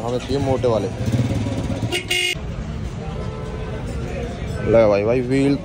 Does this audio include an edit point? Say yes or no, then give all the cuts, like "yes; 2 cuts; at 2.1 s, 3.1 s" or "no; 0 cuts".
no; 0 cuts